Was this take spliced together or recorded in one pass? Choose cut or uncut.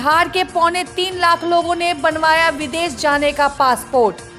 uncut